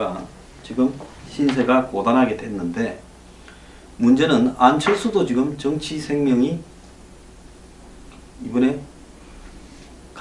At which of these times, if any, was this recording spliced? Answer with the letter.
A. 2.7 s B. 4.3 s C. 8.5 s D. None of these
C